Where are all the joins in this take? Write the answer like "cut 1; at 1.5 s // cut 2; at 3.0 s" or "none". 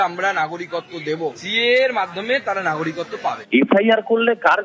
cut 1; at 1.4 s // cut 2; at 3.4 s